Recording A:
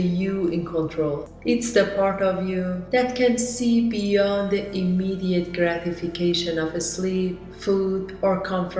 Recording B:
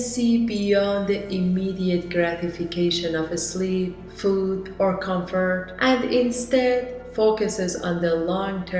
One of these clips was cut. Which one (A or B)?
A